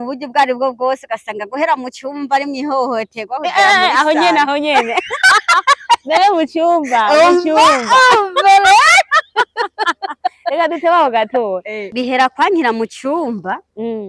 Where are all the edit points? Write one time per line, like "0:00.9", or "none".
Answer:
0:11.8